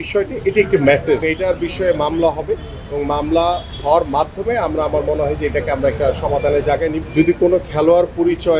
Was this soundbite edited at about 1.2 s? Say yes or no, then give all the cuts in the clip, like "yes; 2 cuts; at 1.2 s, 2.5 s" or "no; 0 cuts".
yes; 2 cuts; at 1.2 s, 7.0 s